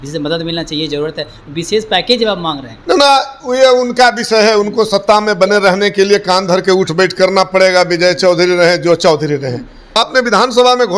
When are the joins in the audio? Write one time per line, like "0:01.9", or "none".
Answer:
0:10.0